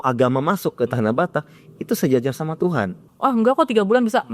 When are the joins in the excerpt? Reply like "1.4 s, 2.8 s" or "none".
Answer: 3.0 s